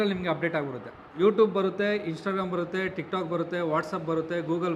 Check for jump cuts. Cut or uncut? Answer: cut